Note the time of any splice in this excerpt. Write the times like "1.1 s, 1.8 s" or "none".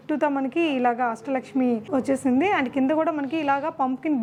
none